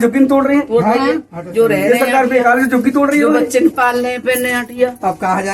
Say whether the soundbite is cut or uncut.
uncut